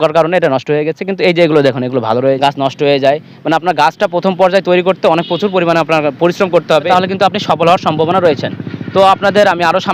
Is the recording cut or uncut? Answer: cut